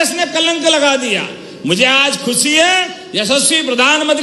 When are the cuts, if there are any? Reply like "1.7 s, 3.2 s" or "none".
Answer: none